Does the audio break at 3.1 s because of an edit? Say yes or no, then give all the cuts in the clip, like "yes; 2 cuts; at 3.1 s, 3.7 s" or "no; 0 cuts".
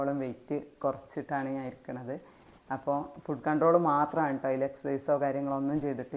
no; 0 cuts